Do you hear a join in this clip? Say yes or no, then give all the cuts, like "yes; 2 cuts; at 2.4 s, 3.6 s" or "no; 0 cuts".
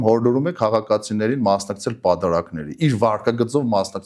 no; 0 cuts